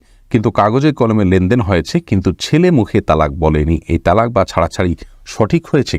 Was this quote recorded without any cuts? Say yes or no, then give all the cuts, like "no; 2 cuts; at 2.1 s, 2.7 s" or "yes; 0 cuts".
yes; 0 cuts